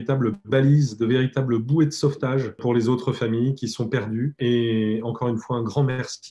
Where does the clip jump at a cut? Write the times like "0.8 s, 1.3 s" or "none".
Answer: 2.6 s